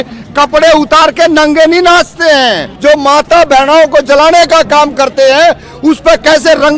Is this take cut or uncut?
cut